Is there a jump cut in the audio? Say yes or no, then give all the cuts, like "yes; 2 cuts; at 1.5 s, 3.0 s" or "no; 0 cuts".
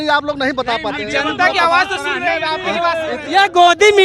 yes; 1 cut; at 3.1 s